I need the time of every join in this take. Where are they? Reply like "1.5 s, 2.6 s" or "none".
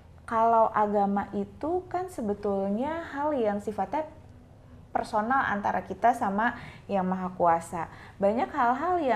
none

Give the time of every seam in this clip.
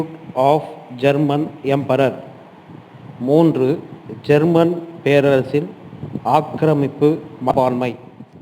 7.5 s

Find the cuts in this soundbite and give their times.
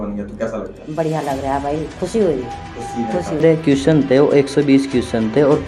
3.4 s

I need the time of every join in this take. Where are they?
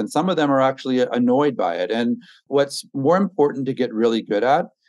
2.4 s

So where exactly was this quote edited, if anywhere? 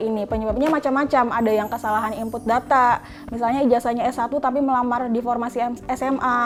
none

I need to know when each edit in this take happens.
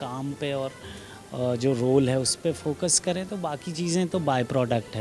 none

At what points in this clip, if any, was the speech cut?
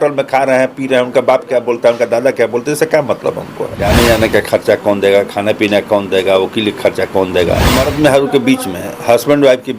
3.8 s, 7.9 s

